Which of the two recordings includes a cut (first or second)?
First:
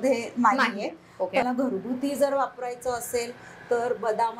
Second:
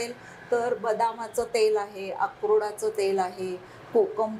first